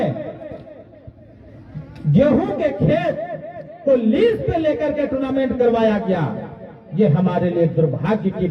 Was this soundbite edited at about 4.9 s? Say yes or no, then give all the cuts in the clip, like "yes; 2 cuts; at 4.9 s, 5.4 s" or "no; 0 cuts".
no; 0 cuts